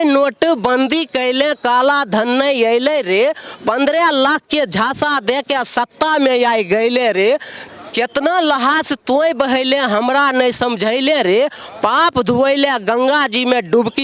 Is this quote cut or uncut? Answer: uncut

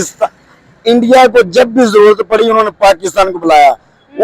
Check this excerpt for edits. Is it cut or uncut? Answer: uncut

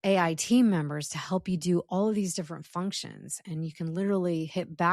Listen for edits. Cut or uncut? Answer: uncut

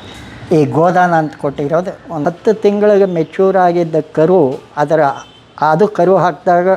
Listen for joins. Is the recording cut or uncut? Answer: cut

